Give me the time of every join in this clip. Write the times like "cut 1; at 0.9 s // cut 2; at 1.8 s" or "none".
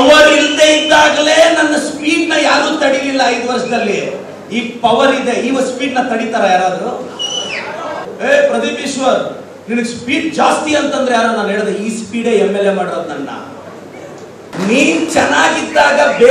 cut 1; at 8.1 s // cut 2; at 14.5 s